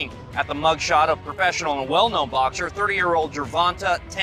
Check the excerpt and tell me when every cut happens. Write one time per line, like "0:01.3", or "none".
none